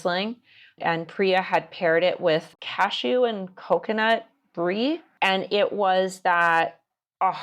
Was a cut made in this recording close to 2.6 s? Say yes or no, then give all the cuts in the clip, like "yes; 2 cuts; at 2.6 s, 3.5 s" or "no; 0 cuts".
yes; 2 cuts; at 2.6 s, 5.1 s